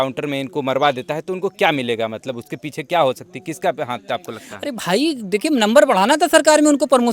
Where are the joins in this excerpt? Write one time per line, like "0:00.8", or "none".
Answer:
none

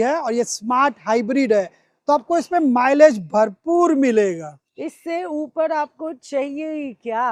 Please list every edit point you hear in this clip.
none

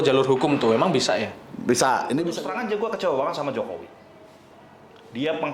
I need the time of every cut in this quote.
0:02.3

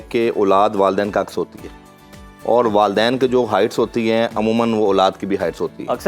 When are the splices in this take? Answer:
none

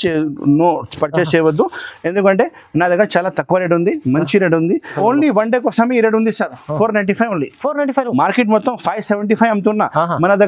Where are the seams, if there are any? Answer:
0:04.9

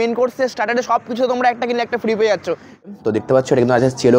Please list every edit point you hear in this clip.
0:03.0

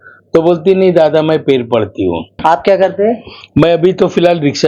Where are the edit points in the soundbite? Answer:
0:02.3

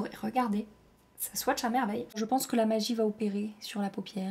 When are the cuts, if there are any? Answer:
0:02.2

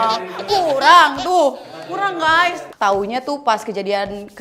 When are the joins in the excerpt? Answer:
0:02.6

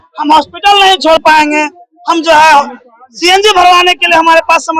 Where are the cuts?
none

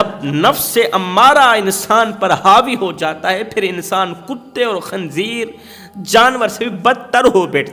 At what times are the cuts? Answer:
none

